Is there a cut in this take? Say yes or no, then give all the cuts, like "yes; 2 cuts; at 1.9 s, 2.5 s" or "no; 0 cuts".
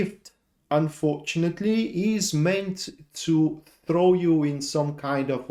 no; 0 cuts